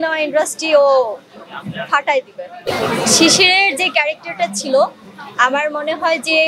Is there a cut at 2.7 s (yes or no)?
yes